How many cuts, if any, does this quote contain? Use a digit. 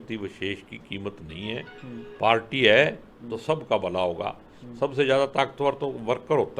0